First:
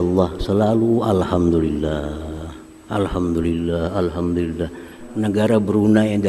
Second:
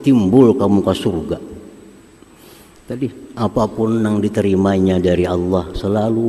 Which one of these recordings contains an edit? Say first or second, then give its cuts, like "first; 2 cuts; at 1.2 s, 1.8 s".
first; 1 cut; at 5.0 s